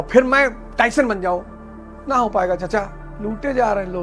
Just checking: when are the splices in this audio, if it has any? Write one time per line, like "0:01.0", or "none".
none